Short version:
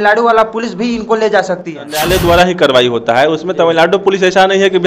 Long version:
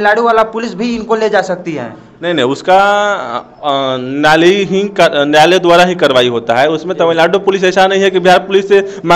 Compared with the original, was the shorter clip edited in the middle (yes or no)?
yes